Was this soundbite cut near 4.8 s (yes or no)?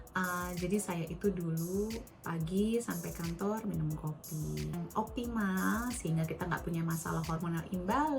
yes